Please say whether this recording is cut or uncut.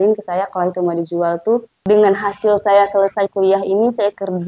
cut